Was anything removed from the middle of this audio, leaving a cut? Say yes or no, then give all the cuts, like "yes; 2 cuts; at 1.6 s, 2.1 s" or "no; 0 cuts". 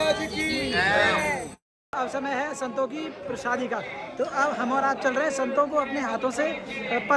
yes; 1 cut; at 1.8 s